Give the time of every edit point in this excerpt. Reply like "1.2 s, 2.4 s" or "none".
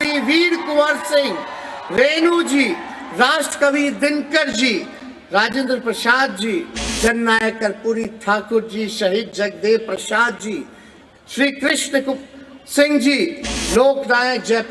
6.8 s

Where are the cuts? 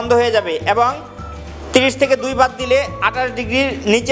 none

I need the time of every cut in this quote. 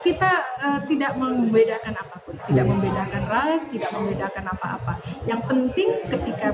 none

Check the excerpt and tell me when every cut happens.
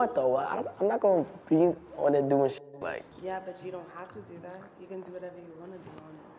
3.1 s

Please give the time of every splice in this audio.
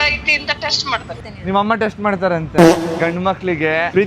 1.1 s

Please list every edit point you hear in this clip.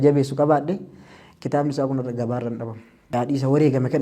3.0 s

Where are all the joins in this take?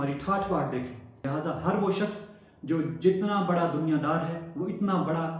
1.1 s

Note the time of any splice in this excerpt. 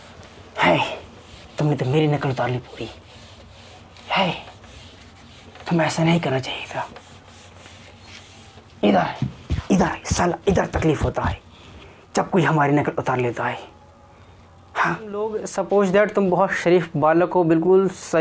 15.4 s

